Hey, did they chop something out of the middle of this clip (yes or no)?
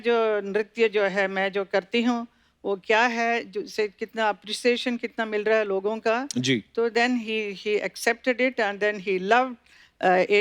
no